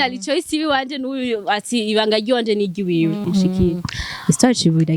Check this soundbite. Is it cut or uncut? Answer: cut